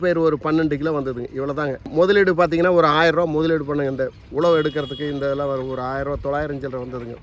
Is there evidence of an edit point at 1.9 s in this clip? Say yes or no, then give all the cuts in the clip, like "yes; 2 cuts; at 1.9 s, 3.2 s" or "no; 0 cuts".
yes; 1 cut; at 1.9 s